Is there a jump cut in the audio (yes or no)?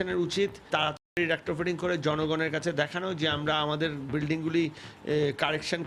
yes